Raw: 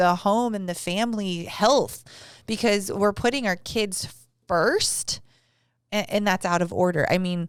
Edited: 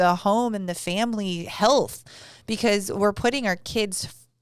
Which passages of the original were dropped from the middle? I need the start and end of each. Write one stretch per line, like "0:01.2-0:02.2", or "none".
none